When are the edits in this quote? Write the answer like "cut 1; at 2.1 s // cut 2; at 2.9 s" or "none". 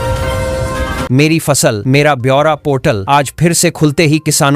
cut 1; at 1.0 s